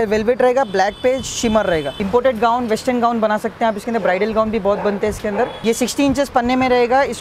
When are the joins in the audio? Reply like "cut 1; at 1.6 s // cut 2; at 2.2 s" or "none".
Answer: cut 1; at 2.0 s // cut 2; at 5.6 s

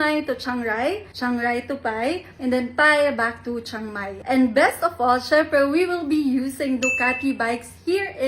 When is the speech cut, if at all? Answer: cut 1; at 4.1 s

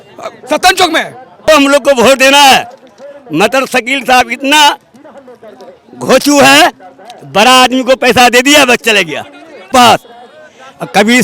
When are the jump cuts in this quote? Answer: cut 1; at 1.4 s // cut 2; at 9.7 s

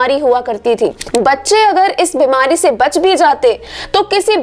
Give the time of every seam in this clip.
cut 1; at 1.0 s

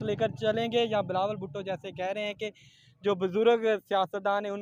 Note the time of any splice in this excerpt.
none

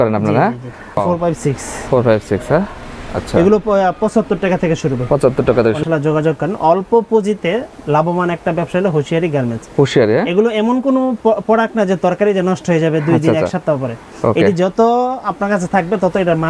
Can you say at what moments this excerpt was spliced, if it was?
cut 1; at 1.0 s // cut 2; at 5.8 s

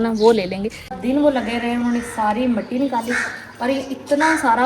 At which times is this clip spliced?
cut 1; at 1.0 s

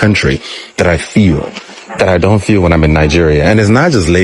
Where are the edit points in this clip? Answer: none

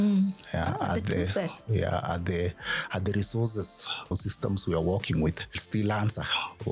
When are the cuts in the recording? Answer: cut 1; at 4.1 s

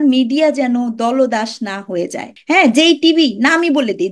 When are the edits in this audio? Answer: cut 1; at 2.3 s

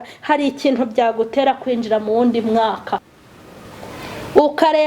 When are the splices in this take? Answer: cut 1; at 3.1 s

